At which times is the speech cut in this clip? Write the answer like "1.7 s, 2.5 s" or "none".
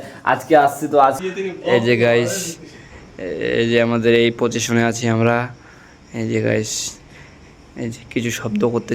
1.2 s